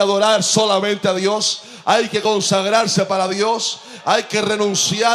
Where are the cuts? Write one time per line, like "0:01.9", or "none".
none